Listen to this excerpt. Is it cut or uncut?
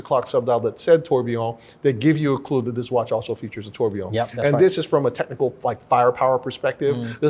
uncut